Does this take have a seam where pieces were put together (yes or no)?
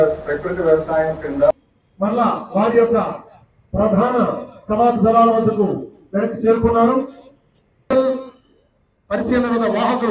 yes